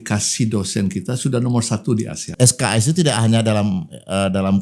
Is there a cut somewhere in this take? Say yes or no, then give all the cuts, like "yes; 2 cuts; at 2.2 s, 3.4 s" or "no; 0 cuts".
yes; 1 cut; at 2.2 s